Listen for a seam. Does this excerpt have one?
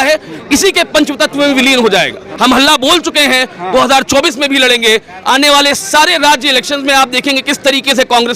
yes; 1 cut; at 2.2 s

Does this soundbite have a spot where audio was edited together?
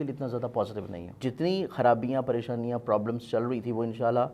yes; 1 cut; at 1.2 s

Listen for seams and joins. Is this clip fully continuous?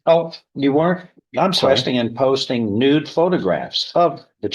no; 1 cut; at 1.6 s

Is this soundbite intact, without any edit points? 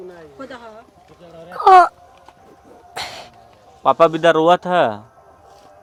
yes; 0 cuts

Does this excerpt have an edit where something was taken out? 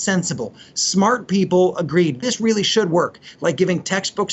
no; 0 cuts

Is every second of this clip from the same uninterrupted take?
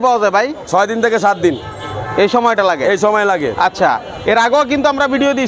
yes; 0 cuts

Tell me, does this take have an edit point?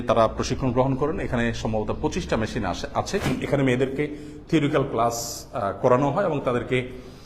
yes; 1 cut; at 3.3 s

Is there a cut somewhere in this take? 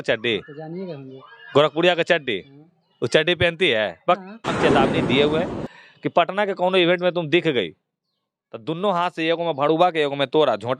yes; 1 cut; at 4.5 s

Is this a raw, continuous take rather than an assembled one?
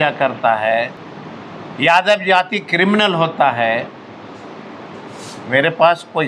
yes; 0 cuts

